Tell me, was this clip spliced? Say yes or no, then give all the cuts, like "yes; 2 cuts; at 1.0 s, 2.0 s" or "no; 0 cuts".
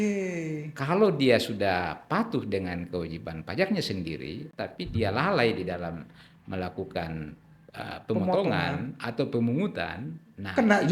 yes; 1 cut; at 4.5 s